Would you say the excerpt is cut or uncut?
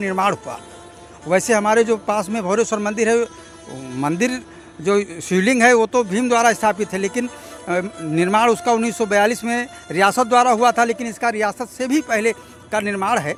uncut